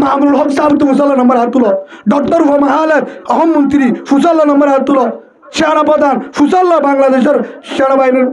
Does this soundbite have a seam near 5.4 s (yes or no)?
yes